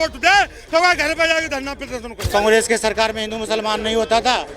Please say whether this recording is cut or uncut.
cut